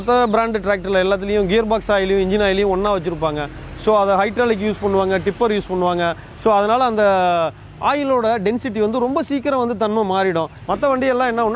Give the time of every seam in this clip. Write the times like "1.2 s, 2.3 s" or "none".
10.6 s